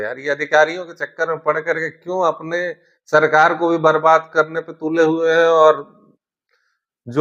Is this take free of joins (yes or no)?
yes